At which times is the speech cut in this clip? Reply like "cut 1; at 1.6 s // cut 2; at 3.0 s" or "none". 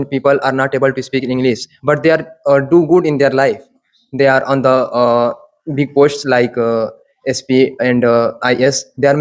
none